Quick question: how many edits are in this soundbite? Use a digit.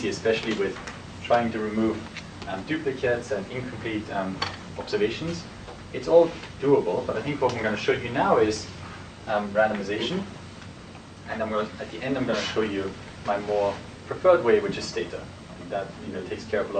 1